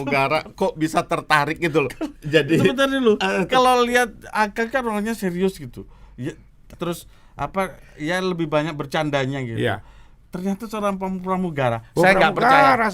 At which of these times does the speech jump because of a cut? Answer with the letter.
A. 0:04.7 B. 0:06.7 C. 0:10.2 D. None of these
B